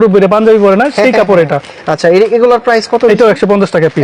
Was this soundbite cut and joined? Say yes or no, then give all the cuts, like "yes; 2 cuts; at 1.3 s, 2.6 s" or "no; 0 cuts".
no; 0 cuts